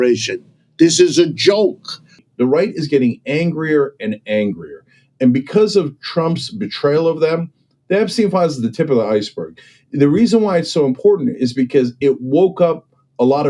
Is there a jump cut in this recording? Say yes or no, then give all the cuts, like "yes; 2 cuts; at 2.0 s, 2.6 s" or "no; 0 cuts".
yes; 1 cut; at 2.2 s